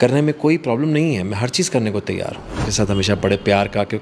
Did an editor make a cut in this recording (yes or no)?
yes